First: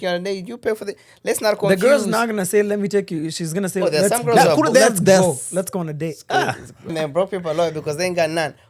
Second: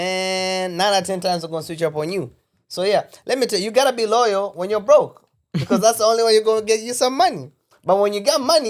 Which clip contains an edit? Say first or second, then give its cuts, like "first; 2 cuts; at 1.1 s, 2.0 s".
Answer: first; 1 cut; at 6.9 s